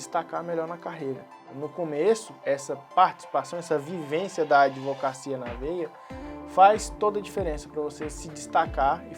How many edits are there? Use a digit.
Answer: 1